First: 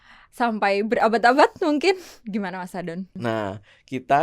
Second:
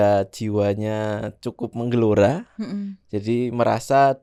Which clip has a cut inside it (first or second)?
first